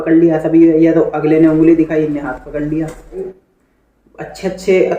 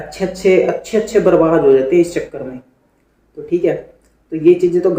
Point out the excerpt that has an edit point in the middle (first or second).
first